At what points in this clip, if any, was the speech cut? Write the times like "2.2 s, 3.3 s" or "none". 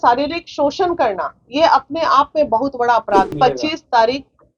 3.3 s